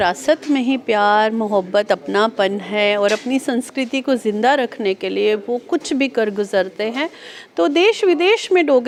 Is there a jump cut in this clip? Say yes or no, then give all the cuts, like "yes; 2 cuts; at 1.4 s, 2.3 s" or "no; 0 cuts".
no; 0 cuts